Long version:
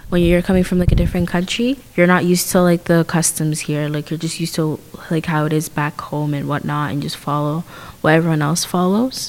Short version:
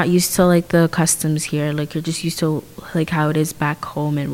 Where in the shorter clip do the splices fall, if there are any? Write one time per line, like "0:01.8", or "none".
none